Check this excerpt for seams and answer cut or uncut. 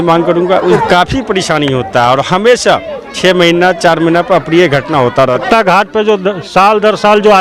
cut